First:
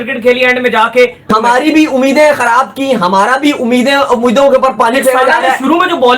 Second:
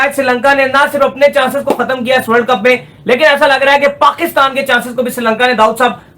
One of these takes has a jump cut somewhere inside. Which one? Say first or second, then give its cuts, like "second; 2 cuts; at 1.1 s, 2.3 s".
first; 1 cut; at 1.2 s